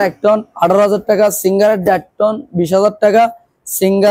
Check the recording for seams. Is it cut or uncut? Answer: uncut